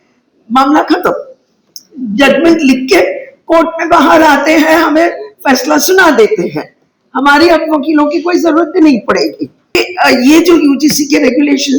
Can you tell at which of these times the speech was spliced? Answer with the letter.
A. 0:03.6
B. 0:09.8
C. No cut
B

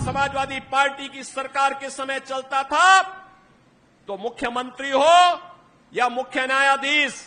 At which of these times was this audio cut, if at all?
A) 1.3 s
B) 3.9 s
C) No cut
C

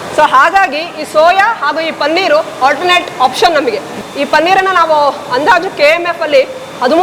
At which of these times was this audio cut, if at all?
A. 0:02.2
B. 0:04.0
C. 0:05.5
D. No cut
B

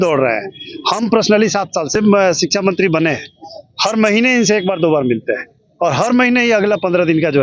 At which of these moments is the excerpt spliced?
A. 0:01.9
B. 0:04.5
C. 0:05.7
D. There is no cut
A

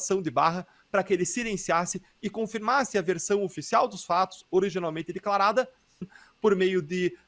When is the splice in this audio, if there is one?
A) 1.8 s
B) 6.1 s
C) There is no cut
B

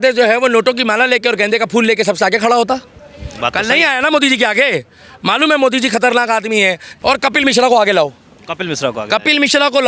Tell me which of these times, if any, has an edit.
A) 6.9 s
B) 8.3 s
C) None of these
A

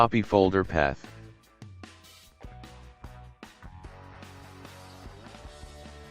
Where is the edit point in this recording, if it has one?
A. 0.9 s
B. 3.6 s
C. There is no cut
A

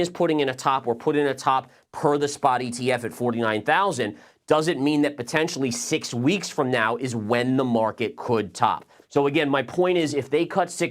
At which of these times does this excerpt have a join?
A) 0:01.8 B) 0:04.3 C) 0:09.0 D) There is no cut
C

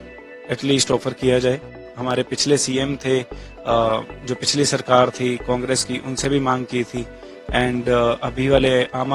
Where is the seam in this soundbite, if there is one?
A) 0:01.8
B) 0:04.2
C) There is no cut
A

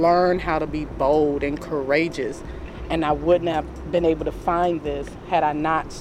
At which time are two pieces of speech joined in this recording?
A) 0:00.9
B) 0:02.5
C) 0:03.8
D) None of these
C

